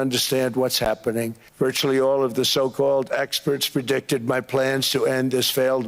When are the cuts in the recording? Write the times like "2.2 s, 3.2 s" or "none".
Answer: 1.4 s